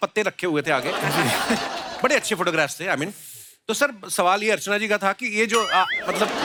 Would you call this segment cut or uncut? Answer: uncut